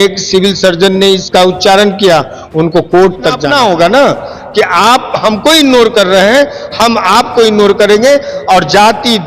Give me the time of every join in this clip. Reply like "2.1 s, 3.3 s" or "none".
3.4 s

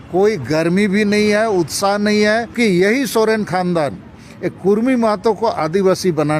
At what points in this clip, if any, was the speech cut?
2.5 s

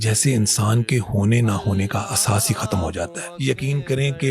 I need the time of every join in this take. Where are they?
3.2 s

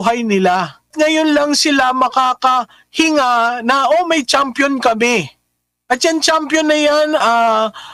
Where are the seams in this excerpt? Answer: 0.9 s

